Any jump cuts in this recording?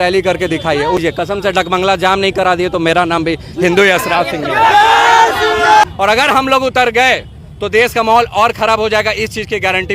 yes; 2 cuts; at 1.0 s, 5.8 s

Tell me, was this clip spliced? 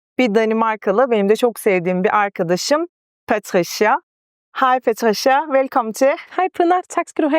no; 0 cuts

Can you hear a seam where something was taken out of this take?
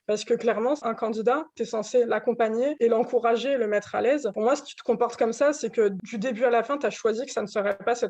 yes; 4 cuts; at 0.8 s, 2.7 s, 4.3 s, 6.0 s

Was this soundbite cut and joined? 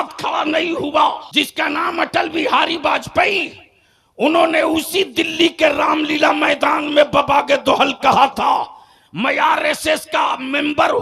yes; 1 cut; at 1.2 s

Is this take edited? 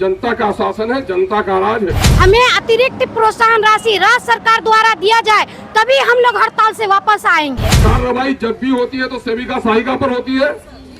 yes; 2 cuts; at 2.0 s, 7.7 s

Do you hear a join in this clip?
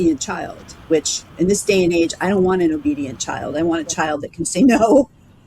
yes; 1 cut; at 1.3 s

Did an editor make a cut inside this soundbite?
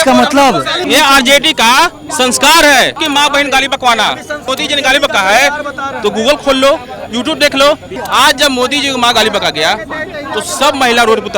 yes; 4 cuts; at 0.8 s, 3.0 s, 4.4 s, 7.9 s

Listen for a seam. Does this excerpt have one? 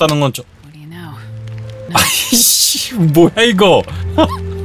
yes; 1 cut; at 1.9 s

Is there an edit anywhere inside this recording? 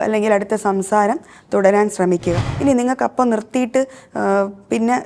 yes; 1 cut; at 2.5 s

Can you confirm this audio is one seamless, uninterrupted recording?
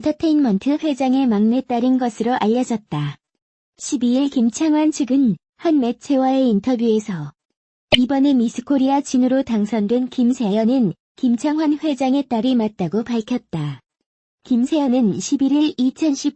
no; 1 cut; at 1.0 s

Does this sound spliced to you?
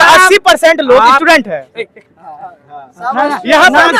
no; 0 cuts

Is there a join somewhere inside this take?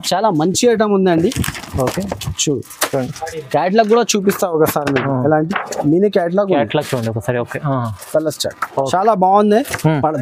no; 0 cuts

